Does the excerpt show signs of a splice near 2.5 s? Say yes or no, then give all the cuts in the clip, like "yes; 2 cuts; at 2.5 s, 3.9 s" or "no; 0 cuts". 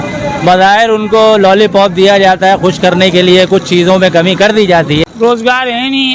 no; 1 cut; at 5.0 s